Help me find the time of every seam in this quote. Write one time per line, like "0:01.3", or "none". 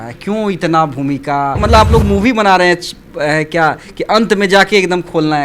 0:01.6